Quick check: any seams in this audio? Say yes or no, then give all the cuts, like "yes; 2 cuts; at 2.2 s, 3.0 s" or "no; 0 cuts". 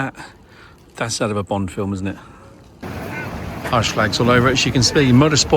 yes; 1 cut; at 2.8 s